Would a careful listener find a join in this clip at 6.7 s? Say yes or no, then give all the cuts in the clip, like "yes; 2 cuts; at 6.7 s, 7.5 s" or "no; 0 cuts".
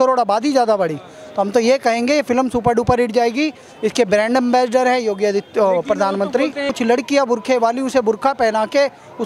yes; 1 cut; at 6.7 s